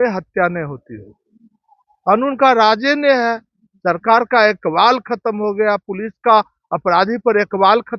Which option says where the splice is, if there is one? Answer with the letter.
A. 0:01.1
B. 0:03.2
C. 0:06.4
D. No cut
D